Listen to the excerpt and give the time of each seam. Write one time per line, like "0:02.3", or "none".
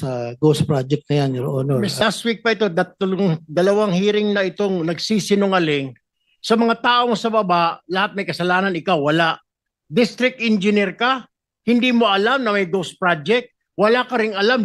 0:02.0

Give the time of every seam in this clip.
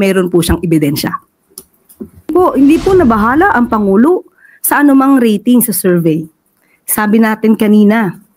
0:02.3

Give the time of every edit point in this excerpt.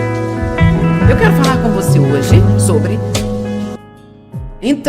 0:03.8

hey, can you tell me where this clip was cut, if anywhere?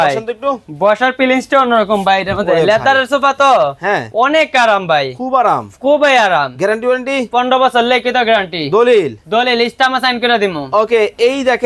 none

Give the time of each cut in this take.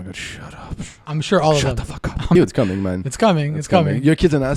0:02.4

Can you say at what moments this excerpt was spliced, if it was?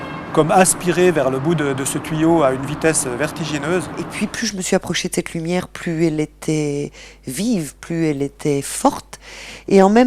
0:04.1

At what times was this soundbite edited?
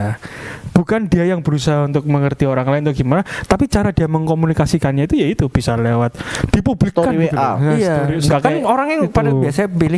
0:08.3

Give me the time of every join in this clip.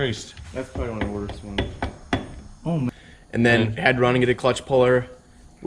0:02.9

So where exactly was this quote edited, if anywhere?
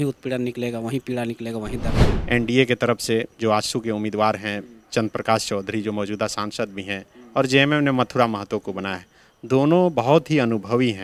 0:02.1

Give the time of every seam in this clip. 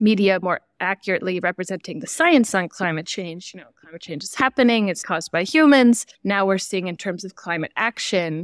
0:05.1
0:06.1

